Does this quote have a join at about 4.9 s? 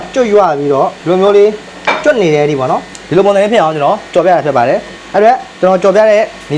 yes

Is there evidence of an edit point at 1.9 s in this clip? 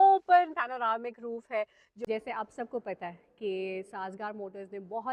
yes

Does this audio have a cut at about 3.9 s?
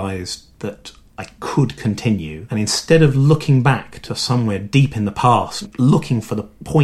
no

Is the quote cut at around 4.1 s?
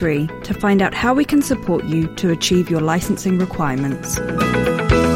yes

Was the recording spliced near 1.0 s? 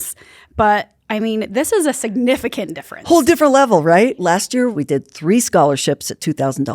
no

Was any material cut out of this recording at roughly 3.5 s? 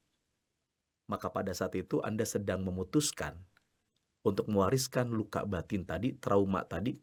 no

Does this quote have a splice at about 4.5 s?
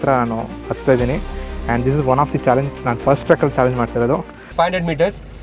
yes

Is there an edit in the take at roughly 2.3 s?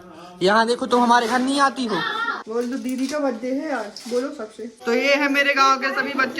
yes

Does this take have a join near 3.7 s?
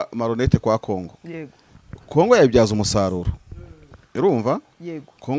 no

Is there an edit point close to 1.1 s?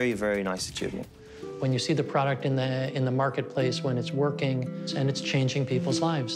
yes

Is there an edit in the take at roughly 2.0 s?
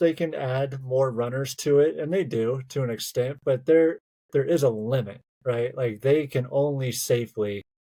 no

